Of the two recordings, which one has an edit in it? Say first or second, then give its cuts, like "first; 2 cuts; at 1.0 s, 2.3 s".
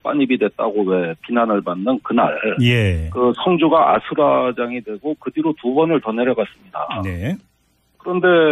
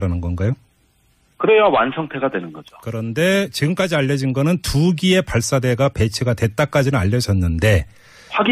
first; 1 cut; at 4.3 s